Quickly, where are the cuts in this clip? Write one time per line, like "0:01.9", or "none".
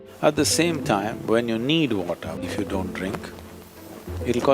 0:02.4